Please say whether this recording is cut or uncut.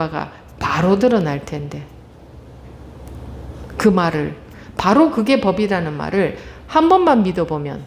uncut